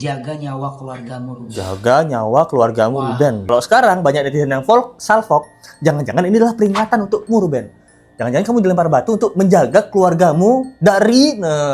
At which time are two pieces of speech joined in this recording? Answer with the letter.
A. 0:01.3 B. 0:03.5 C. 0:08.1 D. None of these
B